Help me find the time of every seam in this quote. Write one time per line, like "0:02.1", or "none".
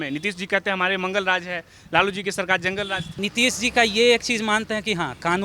0:03.1